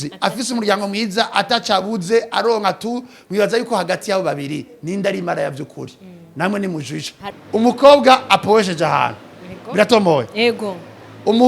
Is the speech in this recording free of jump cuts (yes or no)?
no